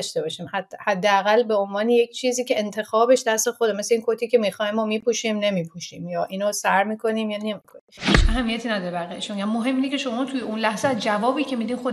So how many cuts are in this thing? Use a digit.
1